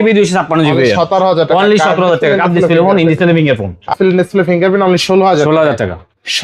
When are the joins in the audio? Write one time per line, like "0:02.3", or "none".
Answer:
0:03.9